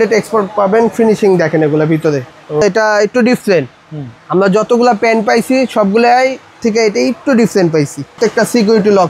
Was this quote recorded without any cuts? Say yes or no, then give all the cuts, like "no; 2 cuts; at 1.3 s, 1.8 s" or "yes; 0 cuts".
no; 2 cuts; at 2.6 s, 8.2 s